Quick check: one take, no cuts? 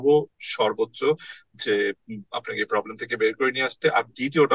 yes; 0 cuts

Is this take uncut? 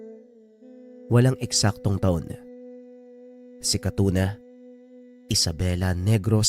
no; 1 cut; at 1.1 s

